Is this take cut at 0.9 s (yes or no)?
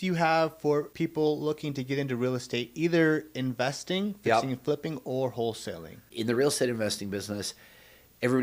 yes